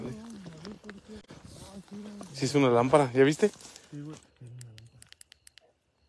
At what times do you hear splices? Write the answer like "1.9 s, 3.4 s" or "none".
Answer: none